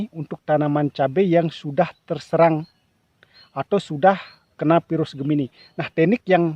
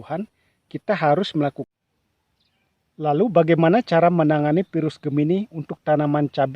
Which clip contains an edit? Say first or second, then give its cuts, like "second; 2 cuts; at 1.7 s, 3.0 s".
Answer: second; 1 cut; at 1.6 s